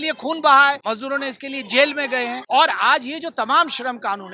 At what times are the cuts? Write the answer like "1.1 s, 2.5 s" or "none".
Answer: 0.8 s, 2.4 s